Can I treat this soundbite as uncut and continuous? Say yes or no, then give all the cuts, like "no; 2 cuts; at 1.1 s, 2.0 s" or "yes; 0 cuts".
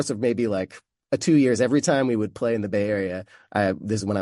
yes; 0 cuts